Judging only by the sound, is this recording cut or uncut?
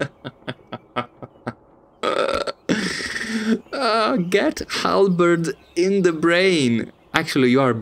uncut